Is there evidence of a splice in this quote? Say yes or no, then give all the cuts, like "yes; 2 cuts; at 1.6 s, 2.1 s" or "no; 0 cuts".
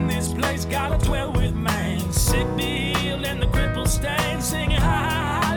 no; 0 cuts